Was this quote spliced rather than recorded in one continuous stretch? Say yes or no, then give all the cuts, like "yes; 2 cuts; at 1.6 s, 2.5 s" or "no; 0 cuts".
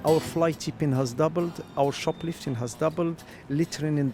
no; 0 cuts